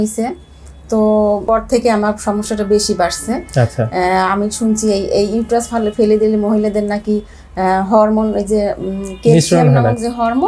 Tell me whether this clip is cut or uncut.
cut